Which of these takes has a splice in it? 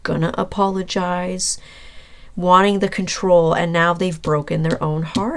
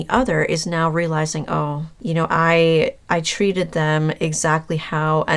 second; 1 cut; at 1.9 s

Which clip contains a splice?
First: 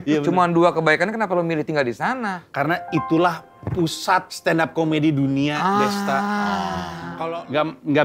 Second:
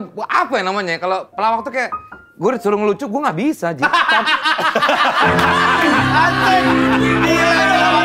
first; 1 cut; at 7.0 s

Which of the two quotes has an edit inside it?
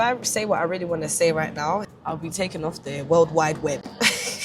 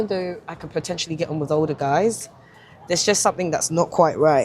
first; 1 cut; at 1.8 s

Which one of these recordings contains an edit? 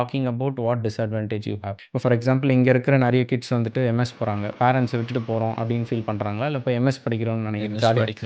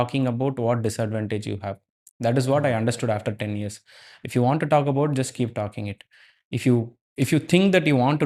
first; 1 cut; at 1.8 s

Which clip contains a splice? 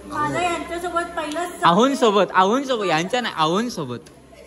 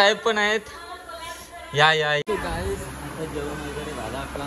second; 1 cut; at 2.2 s

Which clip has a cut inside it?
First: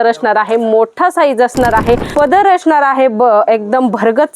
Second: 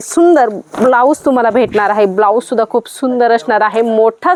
first; 1 cut; at 2.1 s

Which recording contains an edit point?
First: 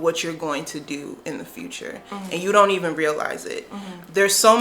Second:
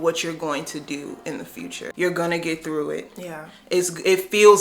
second; 1 cut; at 1.8 s

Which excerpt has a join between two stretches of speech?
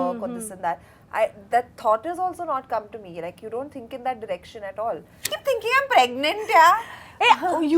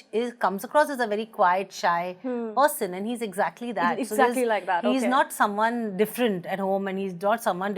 first; 1 cut; at 5.3 s

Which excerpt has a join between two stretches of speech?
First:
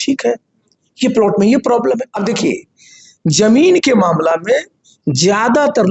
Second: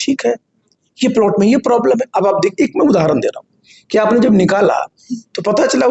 first; 1 cut; at 2.1 s

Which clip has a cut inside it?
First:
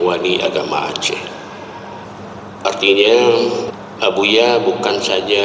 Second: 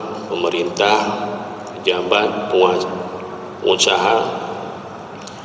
first; 2 cuts; at 2.1 s, 3.7 s

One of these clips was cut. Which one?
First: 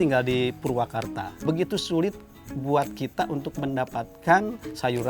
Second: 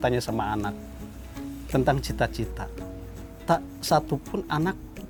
first; 1 cut; at 1.3 s

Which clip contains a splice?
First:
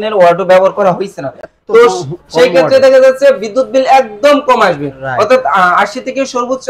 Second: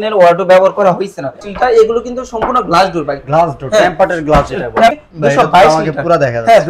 second; 2 cuts; at 1.5 s, 4.9 s

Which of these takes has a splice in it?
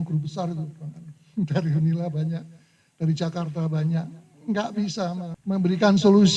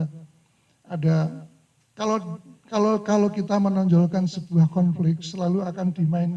first; 1 cut; at 5.3 s

